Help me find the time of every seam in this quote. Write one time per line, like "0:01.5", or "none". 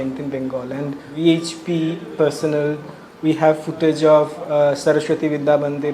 0:01.1